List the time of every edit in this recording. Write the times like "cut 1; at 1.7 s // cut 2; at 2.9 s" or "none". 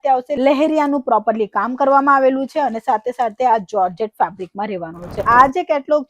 cut 1; at 5.2 s

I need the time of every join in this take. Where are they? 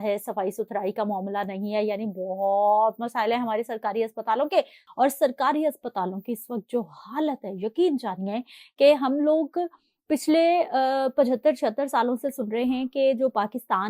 cut 1; at 4.8 s

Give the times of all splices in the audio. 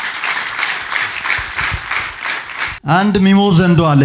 none

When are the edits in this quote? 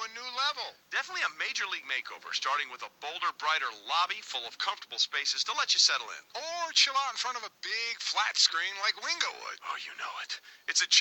cut 1; at 4.3 s

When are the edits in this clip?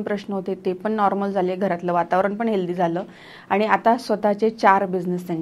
none

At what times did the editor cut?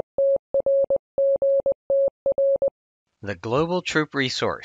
none

